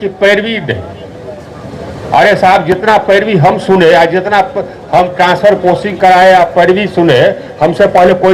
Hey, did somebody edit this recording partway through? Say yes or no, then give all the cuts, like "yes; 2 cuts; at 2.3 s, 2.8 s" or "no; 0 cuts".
no; 0 cuts